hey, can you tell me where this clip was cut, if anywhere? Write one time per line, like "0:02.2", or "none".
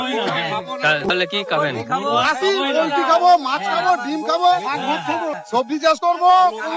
0:01.1
0:05.4